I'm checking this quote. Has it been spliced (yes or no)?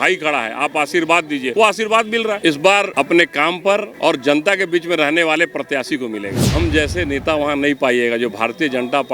yes